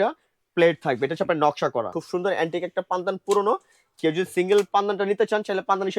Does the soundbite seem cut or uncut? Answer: cut